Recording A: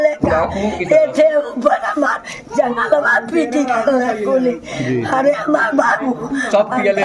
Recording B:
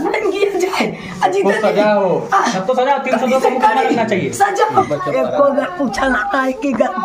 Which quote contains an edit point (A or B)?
B